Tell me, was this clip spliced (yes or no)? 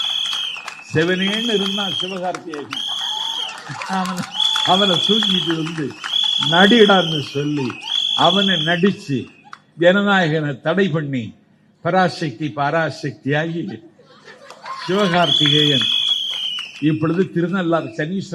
no